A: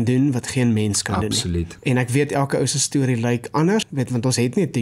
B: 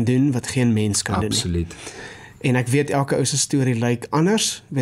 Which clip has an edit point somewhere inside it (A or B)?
A